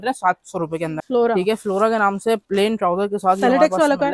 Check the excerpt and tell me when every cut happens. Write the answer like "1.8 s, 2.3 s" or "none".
1.0 s